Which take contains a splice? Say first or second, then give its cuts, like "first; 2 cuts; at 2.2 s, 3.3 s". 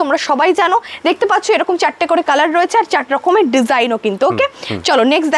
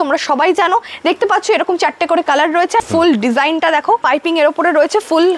second; 2 cuts; at 2.9 s, 4.0 s